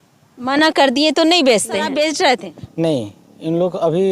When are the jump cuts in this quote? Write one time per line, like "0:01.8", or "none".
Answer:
0:01.9